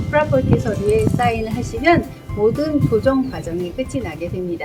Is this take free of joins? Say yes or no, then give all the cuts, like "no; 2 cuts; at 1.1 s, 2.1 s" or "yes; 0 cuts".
yes; 0 cuts